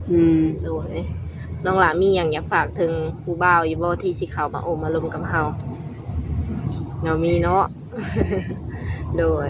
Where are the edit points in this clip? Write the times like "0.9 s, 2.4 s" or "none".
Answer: none

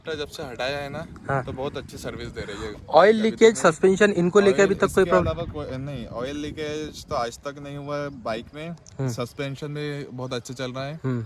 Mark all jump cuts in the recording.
none

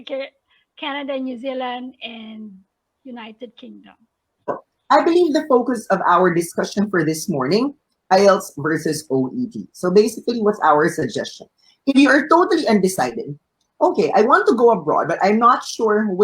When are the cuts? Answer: 4.5 s

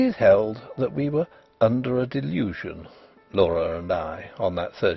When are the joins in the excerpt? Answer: none

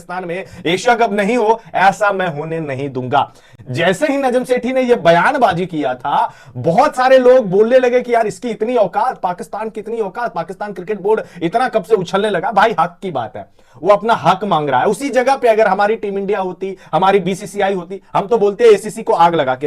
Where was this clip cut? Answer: none

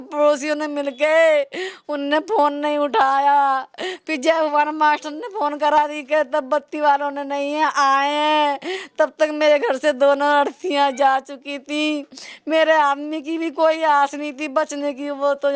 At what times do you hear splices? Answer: none

